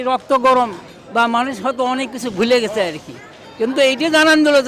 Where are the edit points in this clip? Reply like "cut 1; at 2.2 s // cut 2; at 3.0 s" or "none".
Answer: none